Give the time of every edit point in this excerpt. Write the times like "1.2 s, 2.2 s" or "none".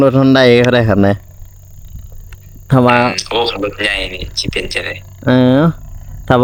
none